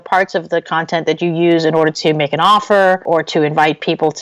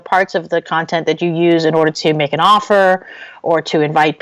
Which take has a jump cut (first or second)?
first